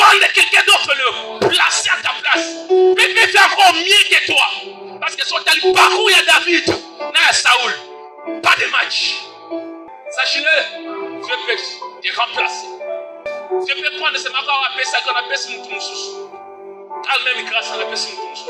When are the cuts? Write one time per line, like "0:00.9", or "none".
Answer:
0:09.9
0:11.3
0:13.3